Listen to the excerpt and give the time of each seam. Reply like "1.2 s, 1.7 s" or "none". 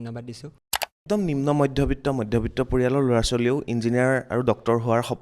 1.0 s